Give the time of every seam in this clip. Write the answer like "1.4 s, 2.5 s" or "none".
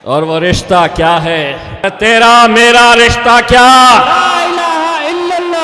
1.9 s